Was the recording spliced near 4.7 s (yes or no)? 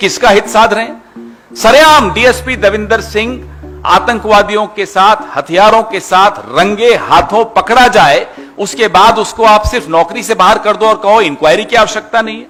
no